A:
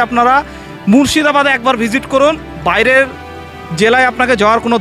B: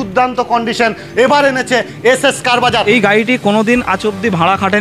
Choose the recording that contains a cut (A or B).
B